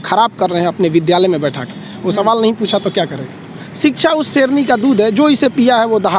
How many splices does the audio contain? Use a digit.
1